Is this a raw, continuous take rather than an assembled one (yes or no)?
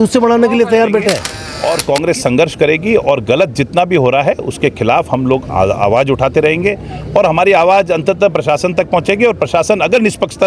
no